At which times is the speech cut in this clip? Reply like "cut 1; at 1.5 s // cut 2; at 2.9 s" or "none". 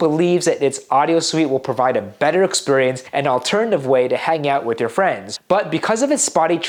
none